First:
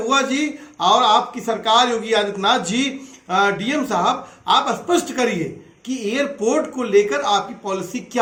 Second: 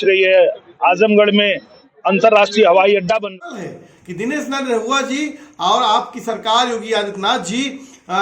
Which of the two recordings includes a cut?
second; 1 cut; at 3.3 s

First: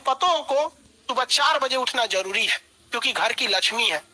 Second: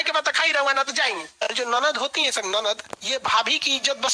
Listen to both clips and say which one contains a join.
second; 2 cuts; at 1.3 s, 2.9 s

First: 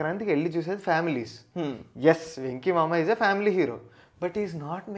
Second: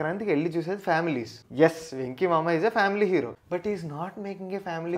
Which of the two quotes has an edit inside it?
second; 2 cuts; at 1.4 s, 3.4 s

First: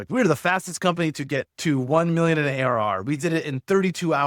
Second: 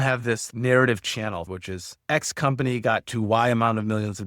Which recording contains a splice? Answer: second; 1 cut; at 1.5 s

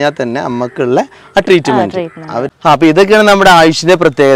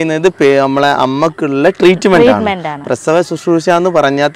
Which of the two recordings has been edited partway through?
first; 1 cut; at 2.5 s

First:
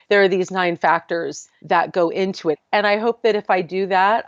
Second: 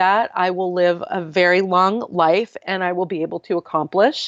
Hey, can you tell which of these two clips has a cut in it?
first; 1 cut; at 2.6 s

